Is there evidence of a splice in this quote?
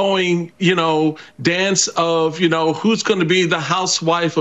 no; 0 cuts

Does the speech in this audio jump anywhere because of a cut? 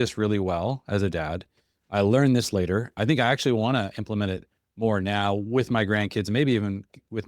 yes; 1 cut; at 3.0 s

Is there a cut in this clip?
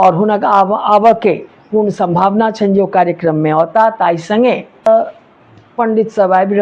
yes; 1 cut; at 4.9 s

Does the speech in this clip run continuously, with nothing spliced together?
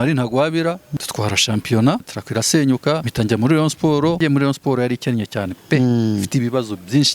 no; 4 cuts; at 0.9 s, 2.2 s, 3.1 s, 4.2 s

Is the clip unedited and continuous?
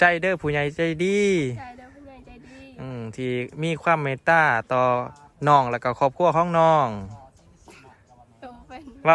yes; 0 cuts

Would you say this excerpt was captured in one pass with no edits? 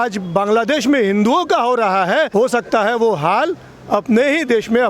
no; 1 cut; at 2.3 s

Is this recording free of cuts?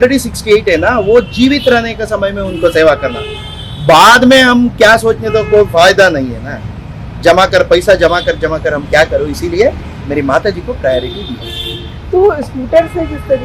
yes; 0 cuts

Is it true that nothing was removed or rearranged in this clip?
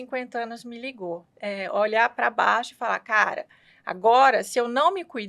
no; 1 cut; at 1.3 s

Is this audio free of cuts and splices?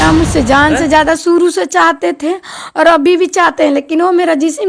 yes; 0 cuts

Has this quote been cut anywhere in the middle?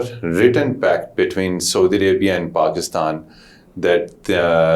no; 0 cuts

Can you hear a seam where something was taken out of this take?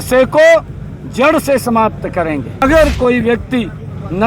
yes; 1 cut; at 2.6 s

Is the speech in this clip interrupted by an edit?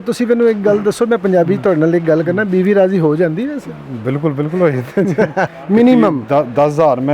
yes; 1 cut; at 5.5 s

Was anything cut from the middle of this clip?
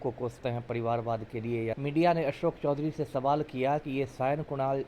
yes; 1 cut; at 1.8 s

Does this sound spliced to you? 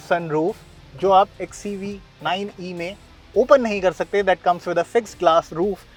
no; 0 cuts

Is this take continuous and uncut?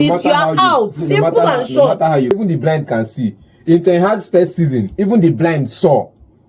no; 1 cut; at 2.3 s

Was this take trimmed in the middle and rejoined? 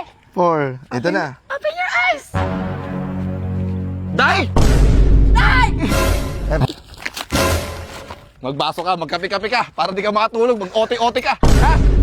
yes; 1 cut; at 6.6 s

